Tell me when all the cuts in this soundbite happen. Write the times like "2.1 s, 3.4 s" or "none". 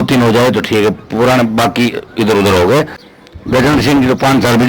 3.0 s